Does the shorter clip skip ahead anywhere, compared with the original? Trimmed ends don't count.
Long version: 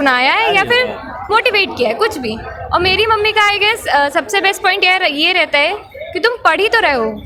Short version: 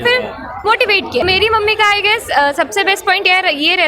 yes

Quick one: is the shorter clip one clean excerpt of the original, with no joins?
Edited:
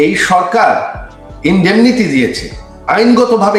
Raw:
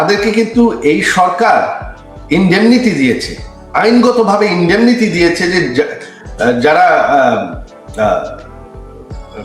yes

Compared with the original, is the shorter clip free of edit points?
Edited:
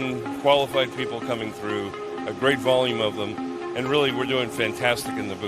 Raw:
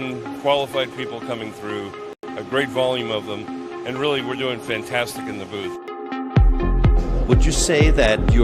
no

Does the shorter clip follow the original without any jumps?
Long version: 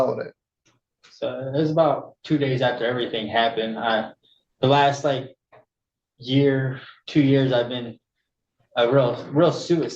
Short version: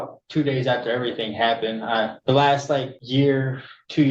no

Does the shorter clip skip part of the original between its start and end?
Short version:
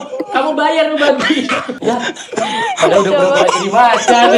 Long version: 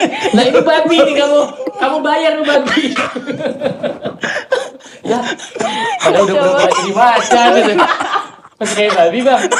yes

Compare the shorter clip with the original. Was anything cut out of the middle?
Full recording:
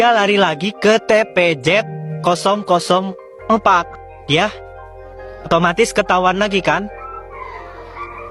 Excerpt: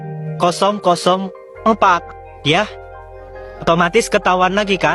no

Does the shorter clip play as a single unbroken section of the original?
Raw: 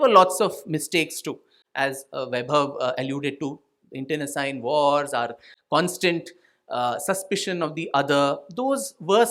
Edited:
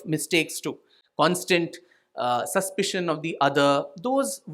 no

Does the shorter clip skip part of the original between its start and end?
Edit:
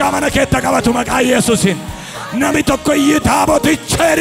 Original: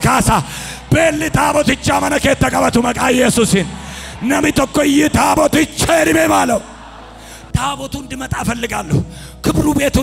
no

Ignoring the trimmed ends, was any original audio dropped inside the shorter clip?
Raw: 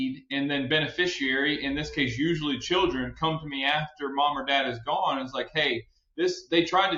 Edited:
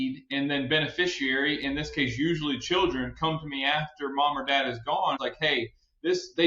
yes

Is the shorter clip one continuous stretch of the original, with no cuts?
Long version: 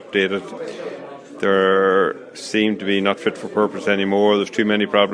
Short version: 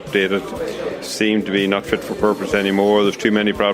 no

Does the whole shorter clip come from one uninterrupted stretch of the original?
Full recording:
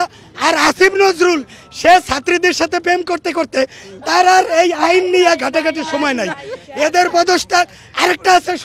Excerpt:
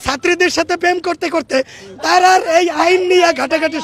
yes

